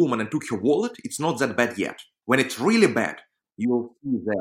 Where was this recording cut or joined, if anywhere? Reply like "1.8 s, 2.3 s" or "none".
2.1 s